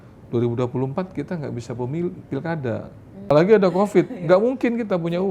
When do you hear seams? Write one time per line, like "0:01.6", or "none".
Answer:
0:03.3